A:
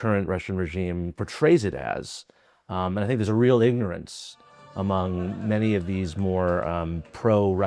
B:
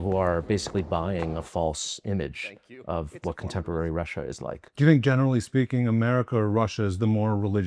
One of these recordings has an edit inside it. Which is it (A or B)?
B